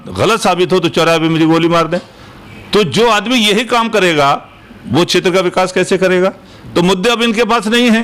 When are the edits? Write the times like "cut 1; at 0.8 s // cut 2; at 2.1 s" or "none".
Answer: none